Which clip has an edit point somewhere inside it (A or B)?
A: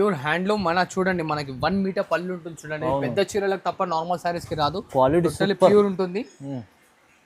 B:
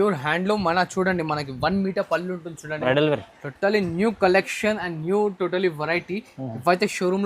B